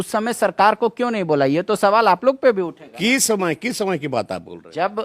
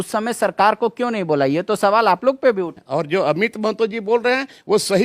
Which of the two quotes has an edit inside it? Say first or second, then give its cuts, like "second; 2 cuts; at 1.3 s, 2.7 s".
second; 1 cut; at 2.8 s